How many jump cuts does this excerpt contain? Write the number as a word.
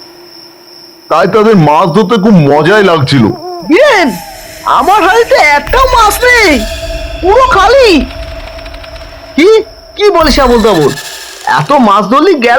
one